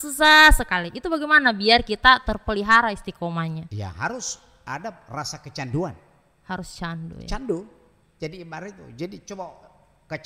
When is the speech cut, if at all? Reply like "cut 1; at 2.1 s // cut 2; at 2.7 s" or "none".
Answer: none